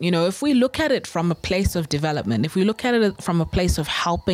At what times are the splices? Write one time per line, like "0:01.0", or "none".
none